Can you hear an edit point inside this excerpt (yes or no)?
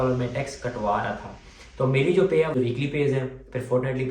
yes